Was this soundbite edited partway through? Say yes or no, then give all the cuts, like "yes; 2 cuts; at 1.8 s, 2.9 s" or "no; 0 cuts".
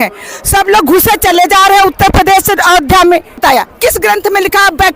yes; 1 cut; at 3.4 s